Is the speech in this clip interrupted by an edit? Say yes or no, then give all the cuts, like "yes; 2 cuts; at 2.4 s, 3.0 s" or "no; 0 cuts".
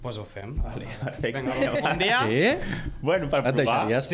no; 0 cuts